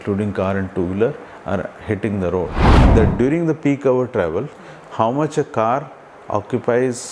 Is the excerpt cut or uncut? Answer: cut